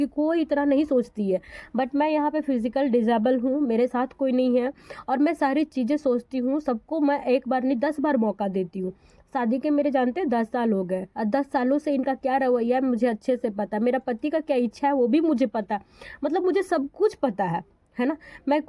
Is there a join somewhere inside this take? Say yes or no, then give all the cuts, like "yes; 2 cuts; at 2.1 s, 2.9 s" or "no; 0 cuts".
no; 0 cuts